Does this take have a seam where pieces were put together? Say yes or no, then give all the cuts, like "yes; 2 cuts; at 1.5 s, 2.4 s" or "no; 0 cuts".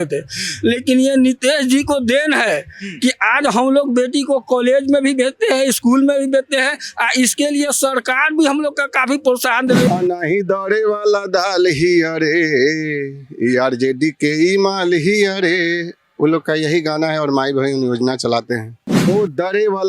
yes; 2 cuts; at 9.9 s, 19.1 s